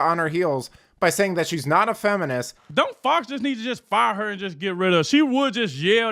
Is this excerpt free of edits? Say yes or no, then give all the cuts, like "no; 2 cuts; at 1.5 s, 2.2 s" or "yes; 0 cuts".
no; 1 cut; at 2.6 s